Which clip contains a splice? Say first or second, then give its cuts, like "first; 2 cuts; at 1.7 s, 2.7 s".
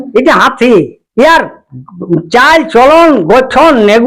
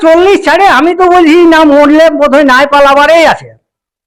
first; 1 cut; at 1.0 s